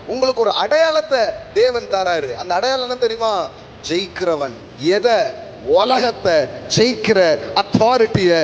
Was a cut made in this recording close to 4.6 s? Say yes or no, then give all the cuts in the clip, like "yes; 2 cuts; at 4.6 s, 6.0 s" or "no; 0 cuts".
yes; 1 cut; at 4.6 s